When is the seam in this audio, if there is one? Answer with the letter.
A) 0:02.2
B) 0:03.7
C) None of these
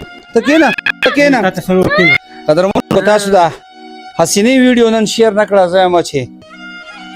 A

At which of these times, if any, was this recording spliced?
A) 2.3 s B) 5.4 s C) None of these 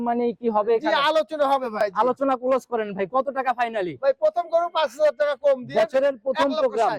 C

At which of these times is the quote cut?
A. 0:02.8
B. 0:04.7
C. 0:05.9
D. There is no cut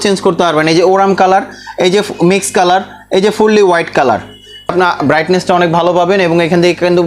B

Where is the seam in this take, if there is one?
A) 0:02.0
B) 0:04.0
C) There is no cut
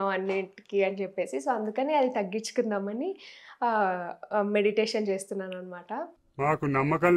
C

